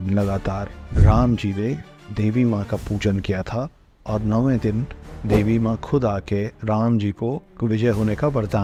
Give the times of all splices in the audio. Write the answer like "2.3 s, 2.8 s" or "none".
none